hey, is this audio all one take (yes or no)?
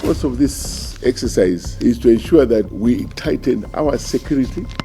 no